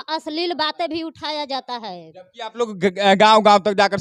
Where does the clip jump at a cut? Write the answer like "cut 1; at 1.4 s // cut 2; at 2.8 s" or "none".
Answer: none

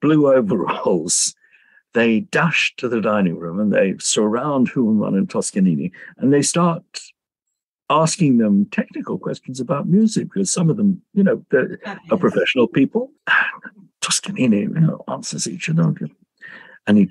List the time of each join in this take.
cut 1; at 13.2 s

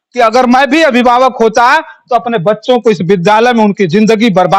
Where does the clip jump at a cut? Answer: none

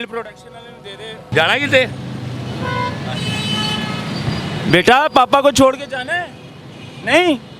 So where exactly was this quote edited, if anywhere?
cut 1; at 1.3 s

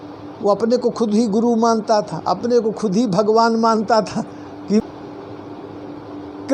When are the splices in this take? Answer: cut 1; at 4.8 s

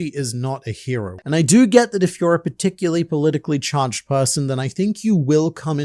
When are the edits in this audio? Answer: cut 1; at 1.2 s

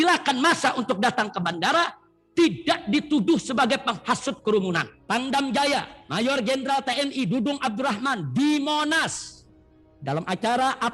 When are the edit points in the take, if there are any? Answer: cut 1; at 4.9 s

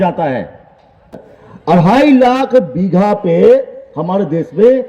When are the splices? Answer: cut 1; at 1.2 s

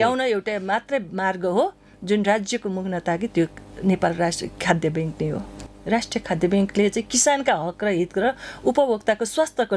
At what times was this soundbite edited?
cut 1; at 5.7 s

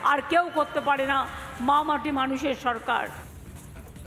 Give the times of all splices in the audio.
cut 1; at 3.2 s

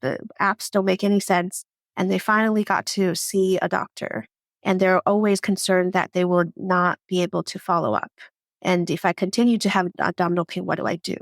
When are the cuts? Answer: cut 1; at 9.9 s

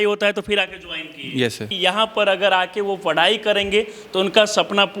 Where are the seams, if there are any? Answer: cut 1; at 1.7 s

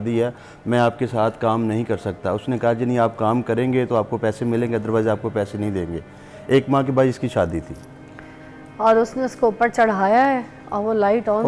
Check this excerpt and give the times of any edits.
none

